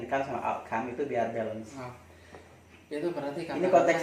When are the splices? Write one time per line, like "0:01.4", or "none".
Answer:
none